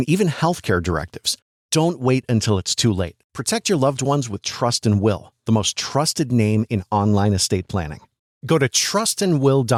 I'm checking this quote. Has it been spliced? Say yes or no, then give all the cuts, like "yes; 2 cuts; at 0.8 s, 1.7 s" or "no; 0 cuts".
no; 0 cuts